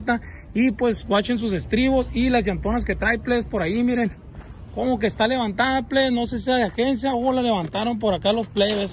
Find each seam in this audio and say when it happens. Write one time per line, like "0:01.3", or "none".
none